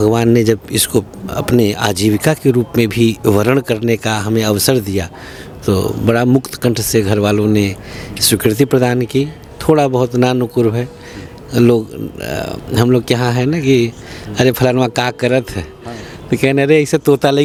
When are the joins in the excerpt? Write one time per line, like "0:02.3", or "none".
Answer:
none

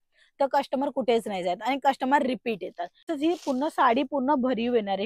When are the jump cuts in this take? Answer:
0:03.1

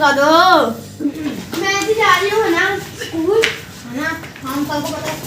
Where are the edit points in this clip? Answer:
0:00.9

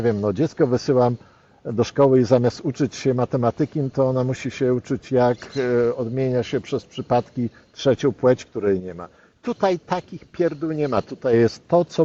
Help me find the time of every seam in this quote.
none

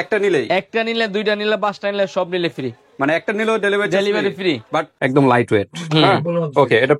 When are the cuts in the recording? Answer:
0:04.9

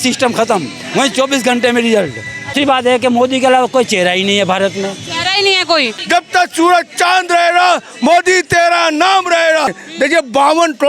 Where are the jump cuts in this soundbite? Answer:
0:02.5
0:05.9
0:09.8

